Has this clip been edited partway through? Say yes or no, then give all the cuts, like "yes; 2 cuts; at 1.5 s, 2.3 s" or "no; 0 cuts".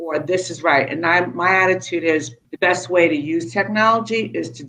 yes; 1 cut; at 2.4 s